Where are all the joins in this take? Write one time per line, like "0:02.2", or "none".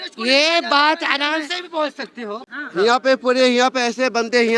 0:02.4